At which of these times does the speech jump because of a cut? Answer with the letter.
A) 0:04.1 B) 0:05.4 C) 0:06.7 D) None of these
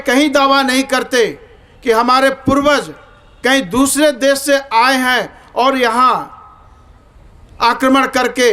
D